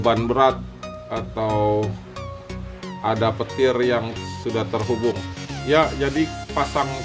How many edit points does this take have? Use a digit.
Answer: 0